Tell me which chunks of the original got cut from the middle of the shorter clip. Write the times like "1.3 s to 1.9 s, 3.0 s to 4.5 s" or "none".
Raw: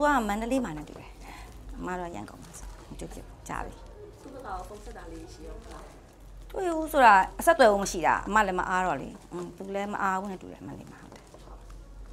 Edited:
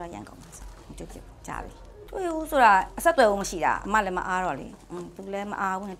4.0 s to 6.4 s